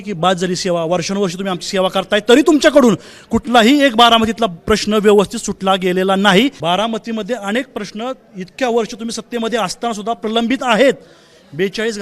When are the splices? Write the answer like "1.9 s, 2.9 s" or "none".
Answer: none